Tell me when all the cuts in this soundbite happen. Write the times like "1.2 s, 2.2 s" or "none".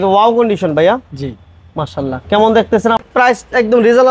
3.0 s